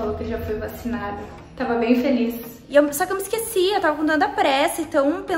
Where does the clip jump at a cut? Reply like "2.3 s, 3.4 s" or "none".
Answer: 2.6 s